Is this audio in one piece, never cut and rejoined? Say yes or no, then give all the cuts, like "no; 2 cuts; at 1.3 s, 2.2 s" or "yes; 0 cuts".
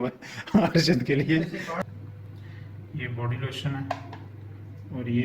no; 1 cut; at 1.9 s